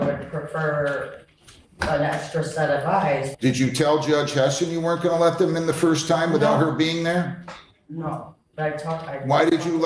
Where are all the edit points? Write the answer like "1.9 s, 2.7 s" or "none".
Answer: 3.3 s